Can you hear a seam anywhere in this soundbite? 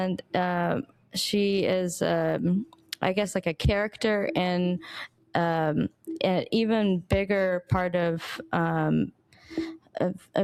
no; 0 cuts

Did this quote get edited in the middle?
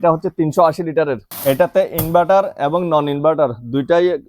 yes; 1 cut; at 1.3 s

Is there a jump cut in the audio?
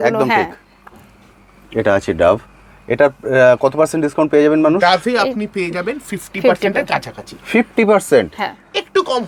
no; 0 cuts

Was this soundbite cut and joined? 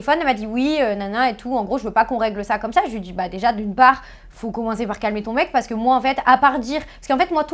no; 0 cuts

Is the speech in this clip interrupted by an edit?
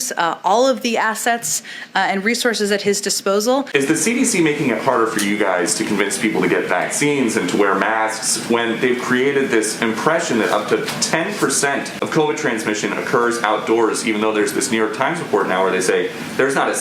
yes; 1 cut; at 3.7 s

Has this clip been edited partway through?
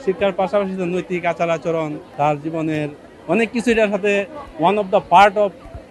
yes; 1 cut; at 2.0 s

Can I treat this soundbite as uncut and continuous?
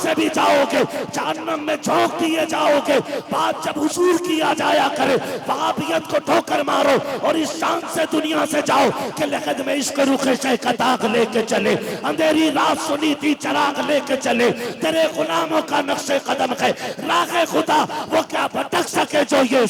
yes; 0 cuts

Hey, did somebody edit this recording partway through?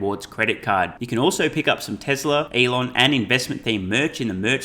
yes; 1 cut; at 2.5 s

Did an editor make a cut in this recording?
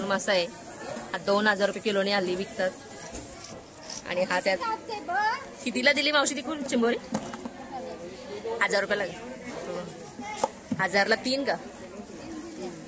yes; 1 cut; at 4.6 s

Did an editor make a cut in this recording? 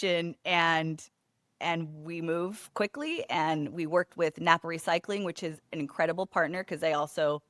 no; 0 cuts

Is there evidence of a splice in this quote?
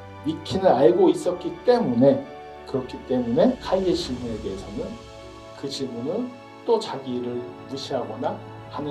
yes; 1 cut; at 3.6 s

